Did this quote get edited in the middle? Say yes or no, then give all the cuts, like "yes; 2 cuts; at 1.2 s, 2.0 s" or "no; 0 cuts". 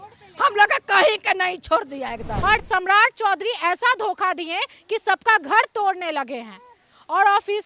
yes; 1 cut; at 2.4 s